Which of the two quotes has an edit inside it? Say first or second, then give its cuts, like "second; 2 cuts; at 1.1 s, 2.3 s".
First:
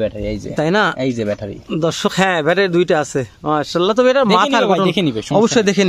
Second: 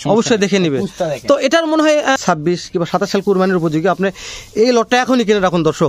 second; 1 cut; at 2.2 s